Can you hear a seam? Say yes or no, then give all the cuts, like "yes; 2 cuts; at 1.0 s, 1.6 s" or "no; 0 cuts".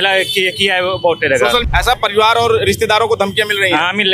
yes; 1 cut; at 1.6 s